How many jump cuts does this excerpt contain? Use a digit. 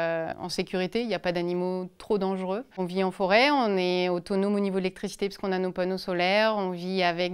0